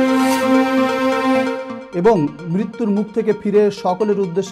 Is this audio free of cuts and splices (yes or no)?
no